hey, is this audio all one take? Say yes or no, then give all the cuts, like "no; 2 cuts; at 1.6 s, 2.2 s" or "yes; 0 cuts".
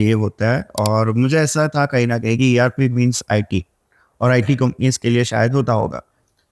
yes; 0 cuts